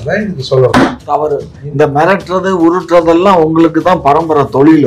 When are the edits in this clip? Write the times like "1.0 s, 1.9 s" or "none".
1.6 s